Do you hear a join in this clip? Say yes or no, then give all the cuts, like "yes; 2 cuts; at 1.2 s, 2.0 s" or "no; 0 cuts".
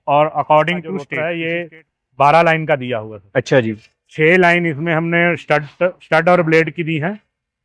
yes; 1 cut; at 1.1 s